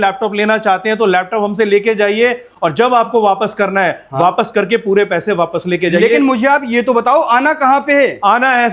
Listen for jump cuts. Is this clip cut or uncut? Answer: uncut